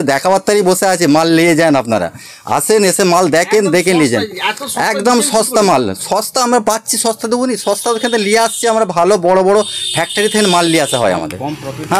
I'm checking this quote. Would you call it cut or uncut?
uncut